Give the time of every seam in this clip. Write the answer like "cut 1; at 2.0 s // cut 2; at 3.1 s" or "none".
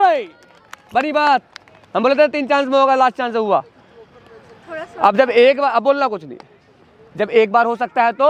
none